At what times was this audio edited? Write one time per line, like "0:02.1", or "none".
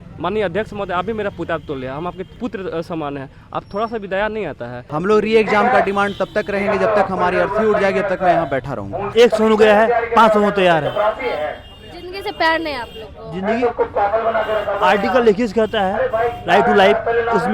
0:02.3
0:04.9
0:09.1

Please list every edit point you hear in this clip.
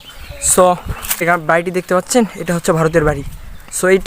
0:01.2

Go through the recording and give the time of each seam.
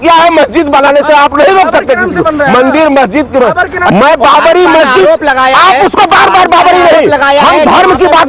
0:03.9

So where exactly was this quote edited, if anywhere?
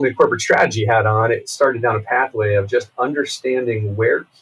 0:01.5

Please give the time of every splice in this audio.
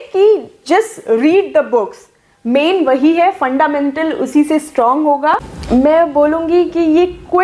0:05.5

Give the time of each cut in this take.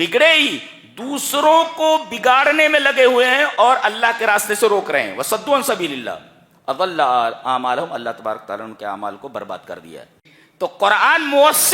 0:10.4

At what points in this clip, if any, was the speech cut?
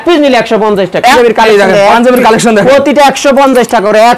0:01.1

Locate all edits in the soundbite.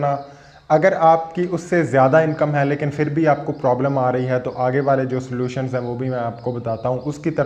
none

